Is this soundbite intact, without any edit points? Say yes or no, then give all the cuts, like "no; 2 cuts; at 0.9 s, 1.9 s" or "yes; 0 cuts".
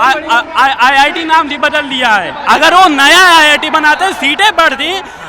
yes; 0 cuts